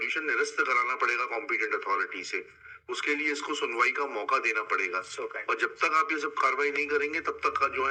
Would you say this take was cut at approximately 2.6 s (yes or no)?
no